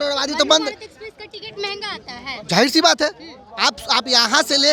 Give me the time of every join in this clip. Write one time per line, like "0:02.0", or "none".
none